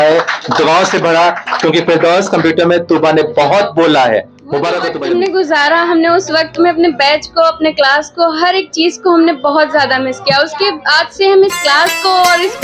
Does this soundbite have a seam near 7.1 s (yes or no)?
no